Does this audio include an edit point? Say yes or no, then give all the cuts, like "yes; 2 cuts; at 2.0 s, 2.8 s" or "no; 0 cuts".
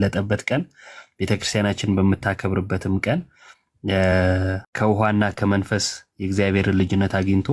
yes; 1 cut; at 4.6 s